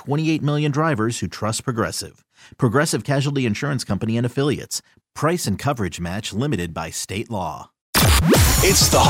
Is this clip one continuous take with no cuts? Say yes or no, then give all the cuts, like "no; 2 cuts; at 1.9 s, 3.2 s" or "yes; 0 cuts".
no; 1 cut; at 7.9 s